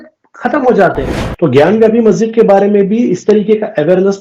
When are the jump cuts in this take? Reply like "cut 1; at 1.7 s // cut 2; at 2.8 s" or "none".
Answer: cut 1; at 1.2 s